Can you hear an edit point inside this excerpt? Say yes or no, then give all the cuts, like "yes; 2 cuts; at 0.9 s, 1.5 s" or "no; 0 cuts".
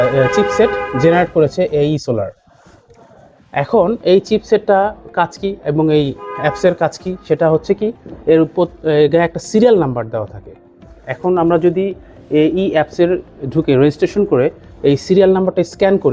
no; 0 cuts